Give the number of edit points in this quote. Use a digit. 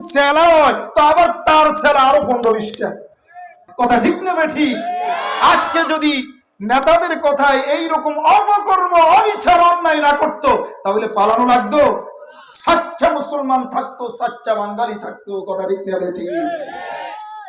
1